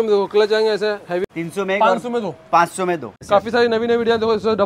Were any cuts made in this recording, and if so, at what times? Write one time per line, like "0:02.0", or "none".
0:01.3
0:03.1